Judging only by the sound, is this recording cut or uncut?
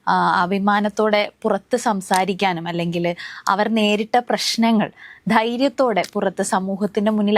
uncut